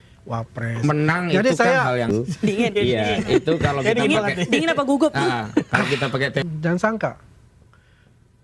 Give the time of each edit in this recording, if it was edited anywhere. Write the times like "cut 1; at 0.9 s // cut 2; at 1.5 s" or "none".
cut 1; at 2.1 s // cut 2; at 6.4 s